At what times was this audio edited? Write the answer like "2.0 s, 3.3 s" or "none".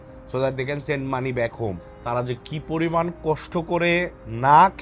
1.9 s